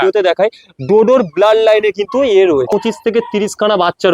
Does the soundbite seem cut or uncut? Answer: cut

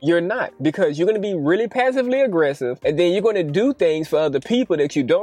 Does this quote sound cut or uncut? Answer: uncut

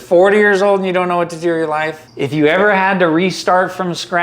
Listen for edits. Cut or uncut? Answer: cut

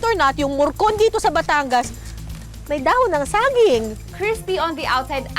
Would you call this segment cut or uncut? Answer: cut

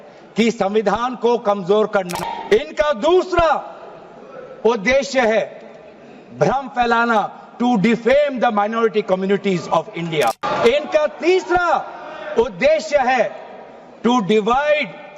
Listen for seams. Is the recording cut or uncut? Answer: cut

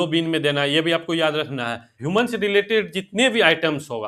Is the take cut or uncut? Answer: cut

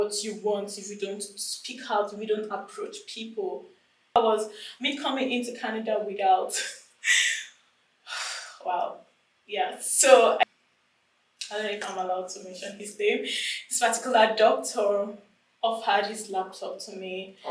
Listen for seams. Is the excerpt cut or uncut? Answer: cut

